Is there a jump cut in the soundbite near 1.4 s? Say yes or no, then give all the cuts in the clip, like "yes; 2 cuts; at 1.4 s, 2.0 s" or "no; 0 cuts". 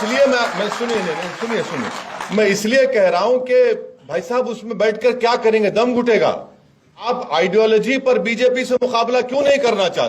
no; 1 cut; at 7.0 s